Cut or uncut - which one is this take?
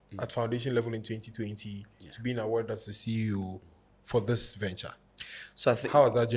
uncut